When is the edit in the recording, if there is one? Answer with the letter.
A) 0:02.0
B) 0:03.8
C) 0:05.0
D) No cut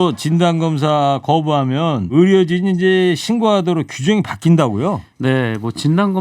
A